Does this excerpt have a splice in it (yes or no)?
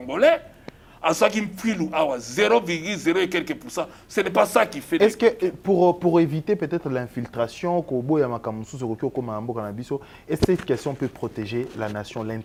no